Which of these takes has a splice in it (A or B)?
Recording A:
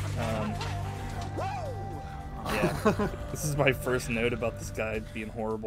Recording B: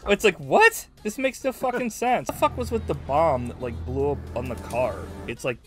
B